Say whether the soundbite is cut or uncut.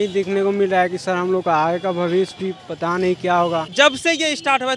cut